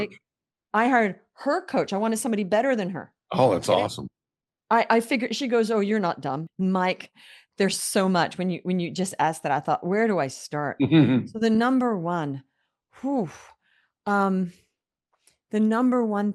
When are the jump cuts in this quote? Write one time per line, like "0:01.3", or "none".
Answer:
0:06.5